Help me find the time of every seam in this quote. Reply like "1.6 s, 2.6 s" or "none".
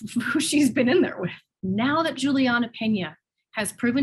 1.4 s